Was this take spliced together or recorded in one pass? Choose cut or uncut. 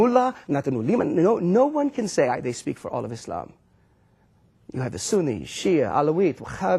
uncut